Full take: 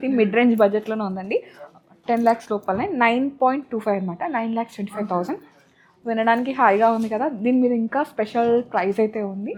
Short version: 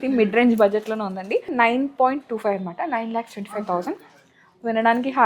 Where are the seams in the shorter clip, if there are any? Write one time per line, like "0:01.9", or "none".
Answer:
0:01.5